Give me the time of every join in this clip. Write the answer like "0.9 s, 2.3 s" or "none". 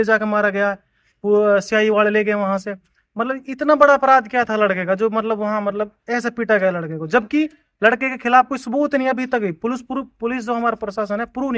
none

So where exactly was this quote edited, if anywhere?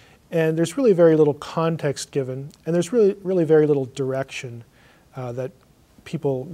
none

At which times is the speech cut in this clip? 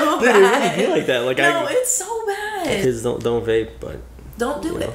2.8 s

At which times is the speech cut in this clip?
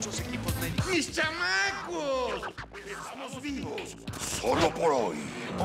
none

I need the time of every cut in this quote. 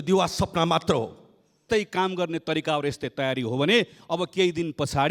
1.6 s

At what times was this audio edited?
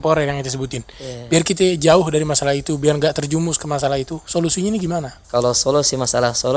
5.2 s

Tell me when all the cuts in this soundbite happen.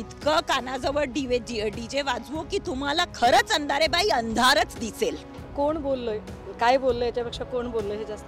none

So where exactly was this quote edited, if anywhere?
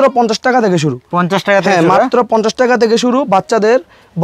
none

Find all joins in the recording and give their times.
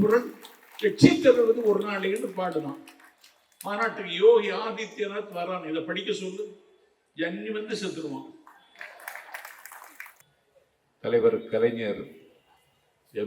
10.2 s

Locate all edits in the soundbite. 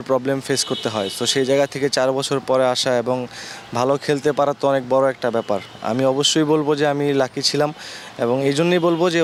none

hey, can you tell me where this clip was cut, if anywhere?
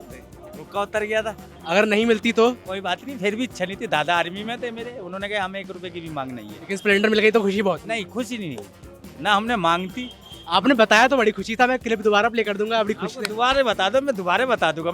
1.5 s, 6.5 s

